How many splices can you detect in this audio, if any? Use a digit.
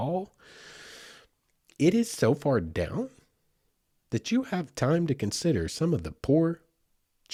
0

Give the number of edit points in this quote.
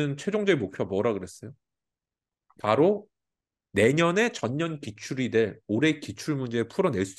0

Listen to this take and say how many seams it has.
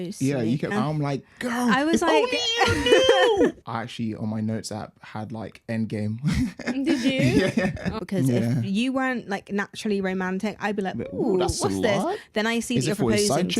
3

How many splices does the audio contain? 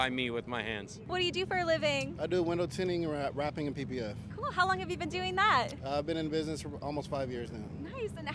0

